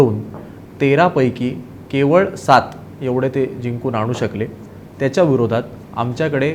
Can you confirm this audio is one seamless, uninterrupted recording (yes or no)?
yes